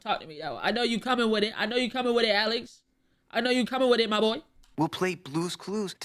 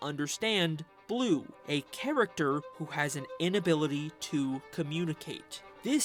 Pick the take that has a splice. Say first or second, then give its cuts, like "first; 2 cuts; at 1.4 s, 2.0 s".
first; 1 cut; at 4.7 s